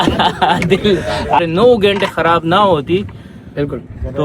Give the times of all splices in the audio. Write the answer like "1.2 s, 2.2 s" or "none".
1.4 s